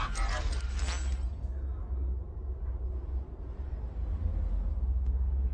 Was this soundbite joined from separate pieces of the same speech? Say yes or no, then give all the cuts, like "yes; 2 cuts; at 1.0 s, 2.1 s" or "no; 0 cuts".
yes; 1 cut; at 4.1 s